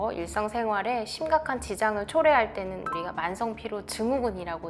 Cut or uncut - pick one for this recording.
uncut